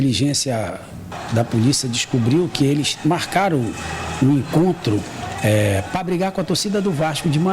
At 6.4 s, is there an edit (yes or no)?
no